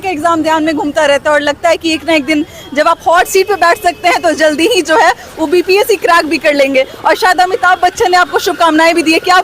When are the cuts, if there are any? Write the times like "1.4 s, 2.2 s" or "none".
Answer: none

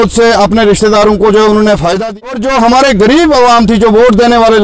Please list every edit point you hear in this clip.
2.0 s

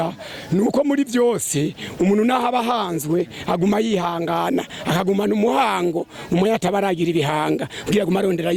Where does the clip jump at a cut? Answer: none

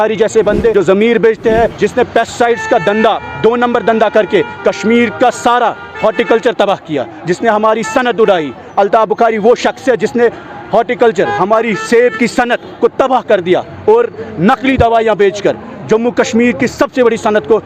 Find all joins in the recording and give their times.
0.7 s, 1.7 s

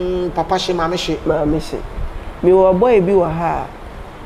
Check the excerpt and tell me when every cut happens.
none

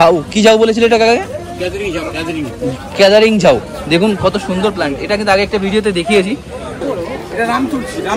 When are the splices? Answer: 6.8 s

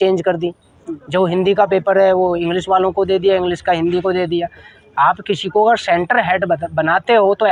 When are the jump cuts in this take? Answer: none

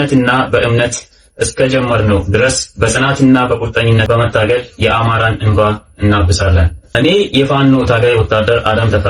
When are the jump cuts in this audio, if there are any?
7.0 s

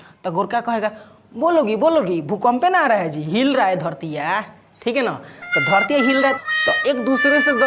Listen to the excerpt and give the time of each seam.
6.3 s

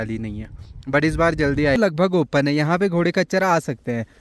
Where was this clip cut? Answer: 1.8 s

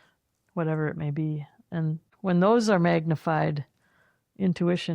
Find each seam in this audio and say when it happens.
2.1 s

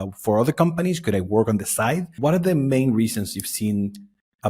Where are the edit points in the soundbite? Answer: 2.1 s

